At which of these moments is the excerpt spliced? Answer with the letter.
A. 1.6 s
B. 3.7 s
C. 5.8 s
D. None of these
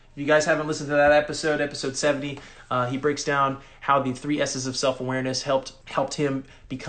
C